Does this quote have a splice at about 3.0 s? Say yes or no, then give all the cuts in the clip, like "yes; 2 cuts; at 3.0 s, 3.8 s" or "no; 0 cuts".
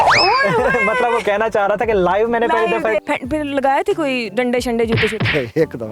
yes; 1 cut; at 3.0 s